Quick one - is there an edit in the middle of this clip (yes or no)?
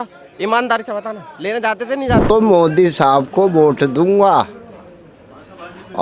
yes